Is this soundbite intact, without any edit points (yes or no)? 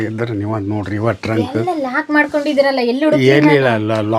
yes